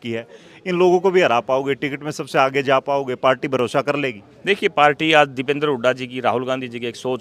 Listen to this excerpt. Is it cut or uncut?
uncut